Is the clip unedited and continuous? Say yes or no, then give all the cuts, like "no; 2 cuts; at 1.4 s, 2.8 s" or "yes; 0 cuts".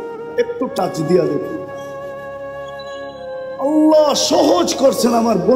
no; 2 cuts; at 1.9 s, 3.2 s